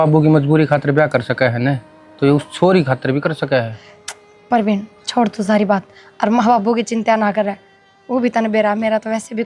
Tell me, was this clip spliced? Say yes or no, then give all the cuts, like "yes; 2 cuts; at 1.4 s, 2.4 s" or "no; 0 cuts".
no; 0 cuts